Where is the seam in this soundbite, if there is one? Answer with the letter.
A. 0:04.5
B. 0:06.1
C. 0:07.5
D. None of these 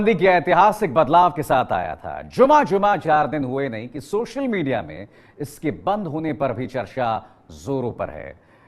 B